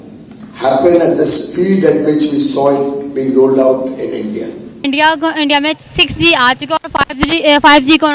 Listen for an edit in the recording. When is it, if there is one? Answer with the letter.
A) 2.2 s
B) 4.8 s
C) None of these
B